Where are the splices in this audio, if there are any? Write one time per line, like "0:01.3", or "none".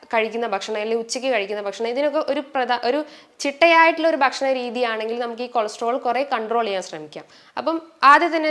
none